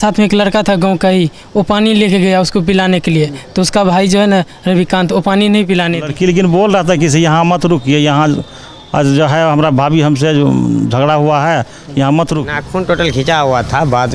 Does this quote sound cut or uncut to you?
cut